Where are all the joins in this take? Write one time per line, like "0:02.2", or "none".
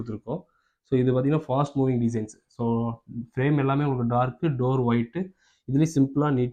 none